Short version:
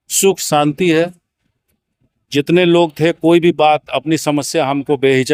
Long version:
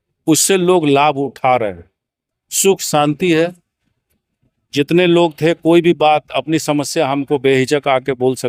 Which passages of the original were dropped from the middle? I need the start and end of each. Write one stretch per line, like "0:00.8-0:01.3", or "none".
none